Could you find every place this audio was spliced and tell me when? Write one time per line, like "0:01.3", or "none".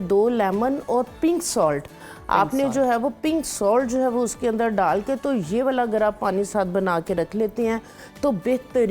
none